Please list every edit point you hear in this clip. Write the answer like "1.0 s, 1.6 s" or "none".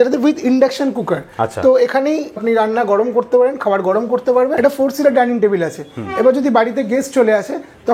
2.4 s, 4.6 s